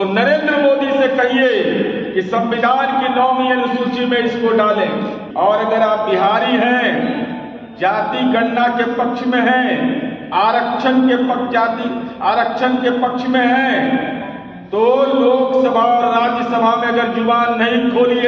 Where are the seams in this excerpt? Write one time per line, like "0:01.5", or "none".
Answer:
0:05.2